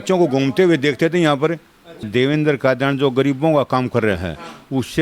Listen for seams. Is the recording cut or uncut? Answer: cut